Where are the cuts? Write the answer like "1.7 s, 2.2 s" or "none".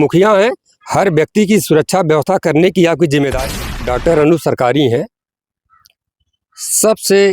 3.6 s